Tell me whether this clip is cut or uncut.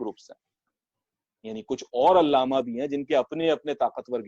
uncut